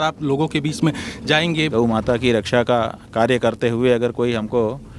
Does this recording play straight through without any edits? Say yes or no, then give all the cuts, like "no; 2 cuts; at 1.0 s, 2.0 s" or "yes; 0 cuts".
no; 1 cut; at 1.6 s